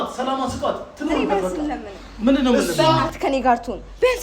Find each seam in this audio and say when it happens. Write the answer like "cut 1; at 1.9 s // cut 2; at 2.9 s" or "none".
cut 1; at 1.4 s